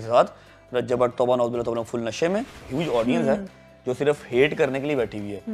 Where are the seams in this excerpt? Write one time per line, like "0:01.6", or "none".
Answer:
0:02.5

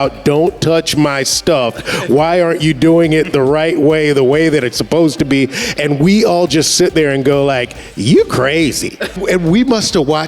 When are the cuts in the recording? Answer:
0:09.2

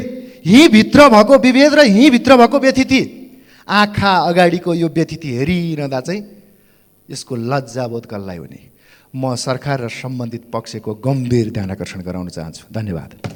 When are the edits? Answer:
none

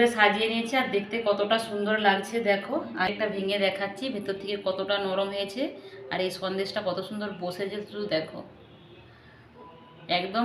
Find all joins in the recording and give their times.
0:03.1

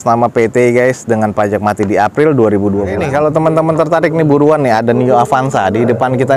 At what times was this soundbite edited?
0:03.0

